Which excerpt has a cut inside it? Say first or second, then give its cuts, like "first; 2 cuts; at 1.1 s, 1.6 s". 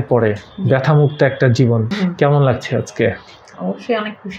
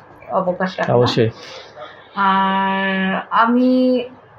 first; 1 cut; at 1.9 s